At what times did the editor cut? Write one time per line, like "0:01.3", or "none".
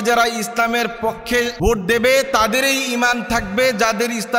0:01.5